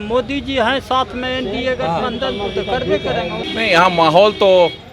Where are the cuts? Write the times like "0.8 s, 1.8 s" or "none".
3.5 s